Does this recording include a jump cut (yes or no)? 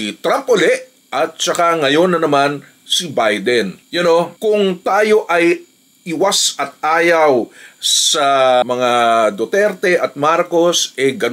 no